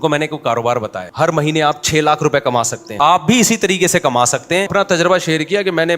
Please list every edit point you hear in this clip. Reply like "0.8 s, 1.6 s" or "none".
1.0 s, 2.8 s, 4.7 s